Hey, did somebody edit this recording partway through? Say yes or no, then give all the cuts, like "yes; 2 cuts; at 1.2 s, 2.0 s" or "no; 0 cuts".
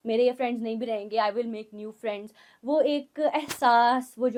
no; 0 cuts